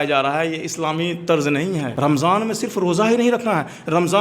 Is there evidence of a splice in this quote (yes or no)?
yes